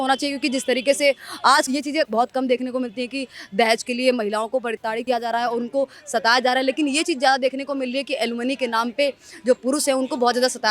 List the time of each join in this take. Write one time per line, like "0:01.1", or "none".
0:01.7
0:04.8